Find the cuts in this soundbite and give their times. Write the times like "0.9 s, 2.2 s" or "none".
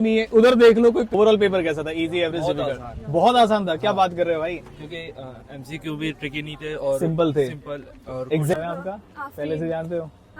1.1 s, 8.5 s

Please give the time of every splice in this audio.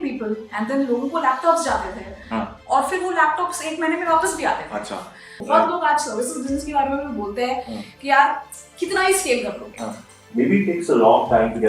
5.3 s, 10.3 s

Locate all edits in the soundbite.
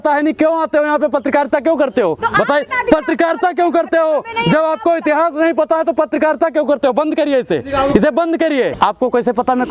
8.7 s

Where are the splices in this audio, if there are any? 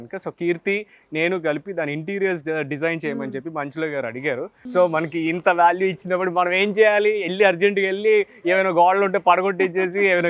4.6 s

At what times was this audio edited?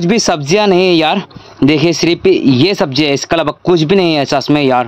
none

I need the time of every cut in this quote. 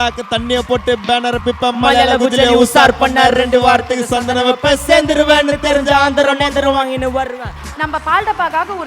7.5 s

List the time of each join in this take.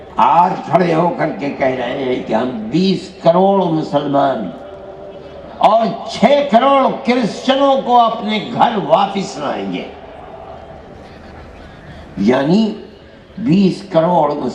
none

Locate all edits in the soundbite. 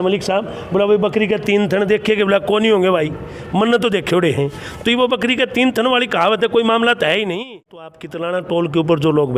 8.1 s

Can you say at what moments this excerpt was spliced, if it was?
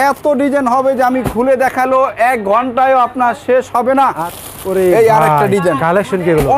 4.3 s

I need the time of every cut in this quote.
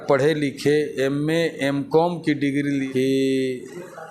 2.9 s

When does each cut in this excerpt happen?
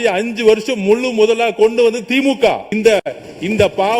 2.7 s

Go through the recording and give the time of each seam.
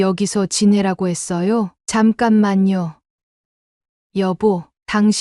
1.8 s, 3.0 s

